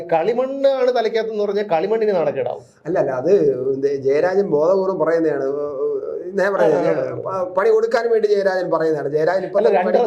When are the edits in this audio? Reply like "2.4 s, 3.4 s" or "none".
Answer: none